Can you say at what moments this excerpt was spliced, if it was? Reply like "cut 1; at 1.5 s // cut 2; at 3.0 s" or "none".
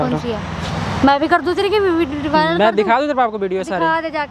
none